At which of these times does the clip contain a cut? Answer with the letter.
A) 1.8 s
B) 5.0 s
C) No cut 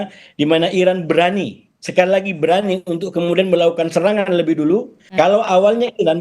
B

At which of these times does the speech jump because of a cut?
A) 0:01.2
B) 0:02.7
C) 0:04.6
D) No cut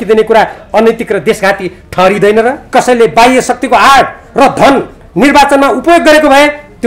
B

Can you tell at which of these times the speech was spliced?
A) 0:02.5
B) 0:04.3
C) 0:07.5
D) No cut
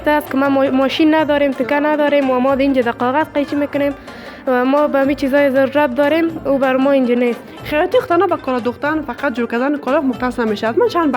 C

